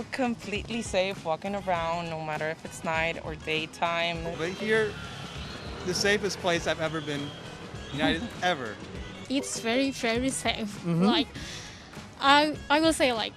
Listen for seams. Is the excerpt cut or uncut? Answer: cut